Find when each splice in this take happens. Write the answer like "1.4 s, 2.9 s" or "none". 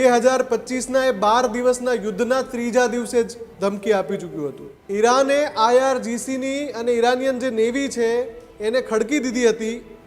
4.7 s